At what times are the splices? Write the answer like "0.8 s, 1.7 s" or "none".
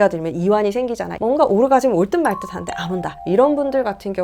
1.1 s